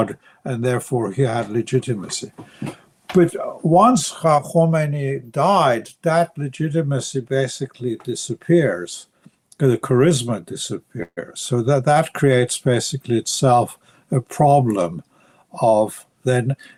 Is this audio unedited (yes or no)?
yes